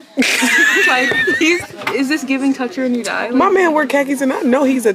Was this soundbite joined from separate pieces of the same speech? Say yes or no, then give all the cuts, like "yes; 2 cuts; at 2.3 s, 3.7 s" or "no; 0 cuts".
yes; 1 cut; at 1.7 s